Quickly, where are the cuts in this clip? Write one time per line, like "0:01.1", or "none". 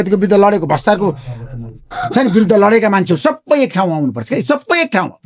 none

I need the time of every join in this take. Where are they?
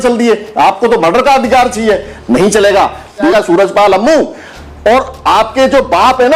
0:03.3

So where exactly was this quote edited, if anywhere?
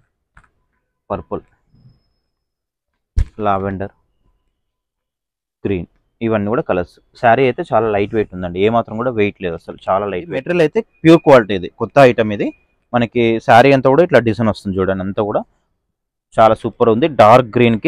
0:10.5

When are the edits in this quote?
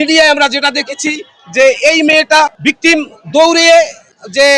0:02.6

